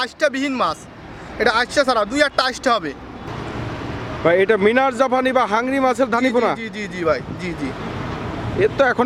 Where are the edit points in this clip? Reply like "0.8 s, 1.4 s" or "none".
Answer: none